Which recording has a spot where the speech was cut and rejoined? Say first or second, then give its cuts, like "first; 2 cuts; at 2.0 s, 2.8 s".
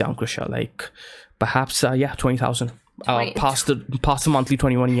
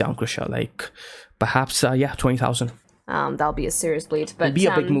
second; 1 cut; at 2.9 s